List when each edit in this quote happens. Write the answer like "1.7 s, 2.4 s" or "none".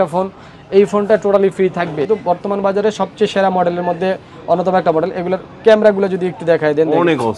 2.1 s